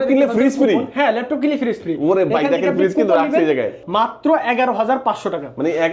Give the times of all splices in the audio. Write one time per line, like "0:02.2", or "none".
0:03.8